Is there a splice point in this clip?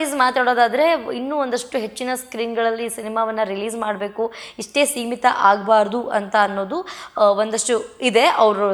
no; 0 cuts

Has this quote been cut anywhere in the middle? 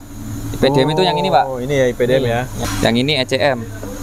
yes; 1 cut; at 2.5 s

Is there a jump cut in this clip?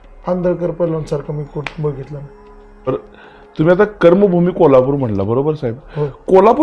yes; 1 cut; at 2.9 s

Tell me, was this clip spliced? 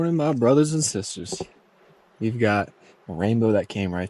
no; 0 cuts

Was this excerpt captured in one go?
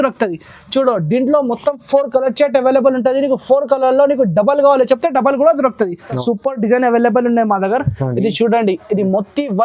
no; 1 cut; at 6.2 s

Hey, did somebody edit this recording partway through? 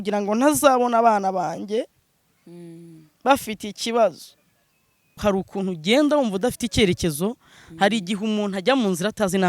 yes; 1 cut; at 5.2 s

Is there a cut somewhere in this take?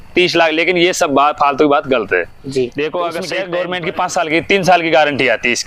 yes; 1 cut; at 3.4 s

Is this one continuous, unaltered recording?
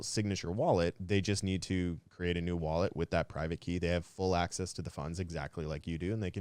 no; 2 cuts; at 1.0 s, 2.1 s

